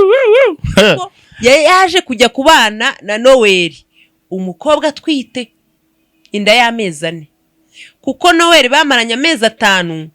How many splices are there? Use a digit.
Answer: 1